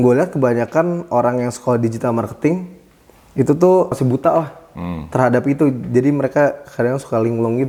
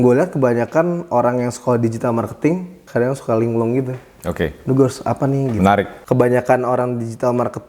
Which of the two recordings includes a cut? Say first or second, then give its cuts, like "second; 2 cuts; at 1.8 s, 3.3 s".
second; 2 cuts; at 2.8 s, 6.0 s